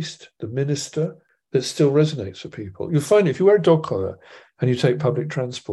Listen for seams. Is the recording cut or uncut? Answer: cut